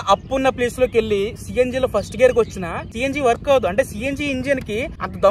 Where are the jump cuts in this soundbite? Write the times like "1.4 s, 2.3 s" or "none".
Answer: none